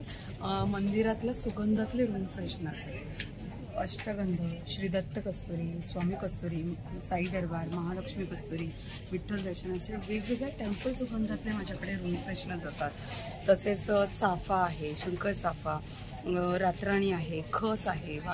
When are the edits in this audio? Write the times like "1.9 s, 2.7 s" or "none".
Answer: none